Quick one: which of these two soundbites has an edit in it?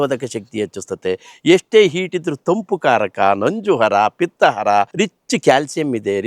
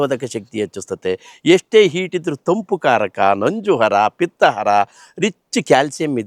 first; 1 cut; at 4.9 s

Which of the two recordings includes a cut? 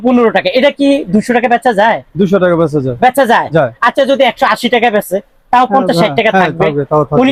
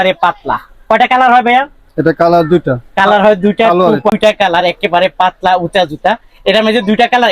second; 1 cut; at 4.1 s

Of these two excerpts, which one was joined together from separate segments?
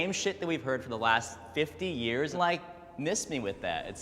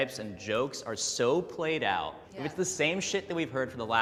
first; 1 cut; at 2.3 s

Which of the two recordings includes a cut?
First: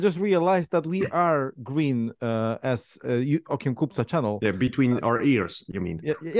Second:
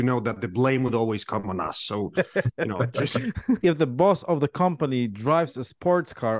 second; 1 cut; at 3.6 s

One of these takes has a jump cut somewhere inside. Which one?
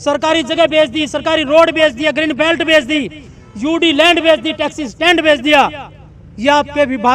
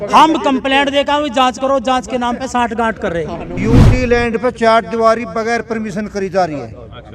second; 1 cut; at 3.6 s

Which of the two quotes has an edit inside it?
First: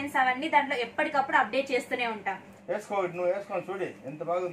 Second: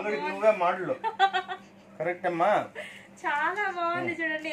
first; 1 cut; at 2.5 s

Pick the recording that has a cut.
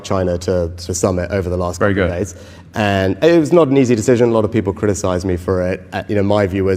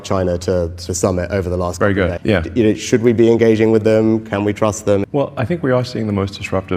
second; 2 cuts; at 2.1 s, 5.1 s

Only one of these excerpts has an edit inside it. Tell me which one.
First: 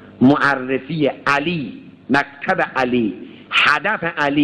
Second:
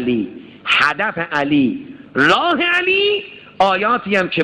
second; 1 cut; at 3.4 s

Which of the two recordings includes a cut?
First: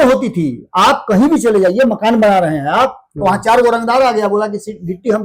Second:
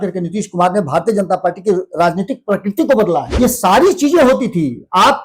second; 1 cut; at 3.3 s

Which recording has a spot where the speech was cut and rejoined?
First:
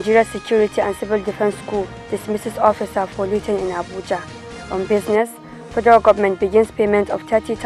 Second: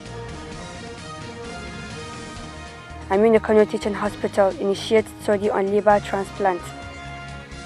second; 1 cut; at 2.9 s

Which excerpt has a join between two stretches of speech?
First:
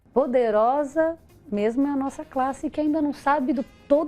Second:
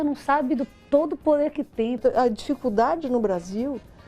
second; 1 cut; at 2.0 s

